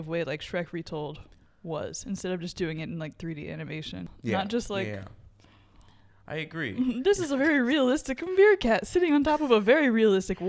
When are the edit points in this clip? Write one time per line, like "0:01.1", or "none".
0:04.1